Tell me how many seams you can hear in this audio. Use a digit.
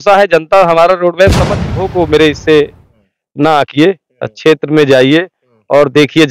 1